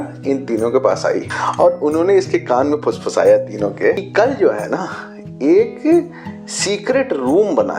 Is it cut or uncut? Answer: cut